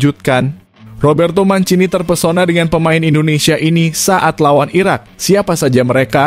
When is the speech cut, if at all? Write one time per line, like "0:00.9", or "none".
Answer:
none